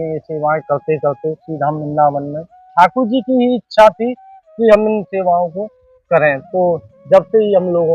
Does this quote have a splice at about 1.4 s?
no; 1 cut; at 2.7 s

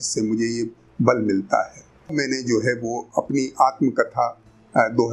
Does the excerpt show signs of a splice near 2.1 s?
yes; 1 cut; at 2.1 s

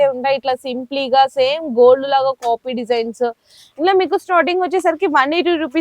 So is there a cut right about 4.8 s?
no; 1 cut; at 3.6 s

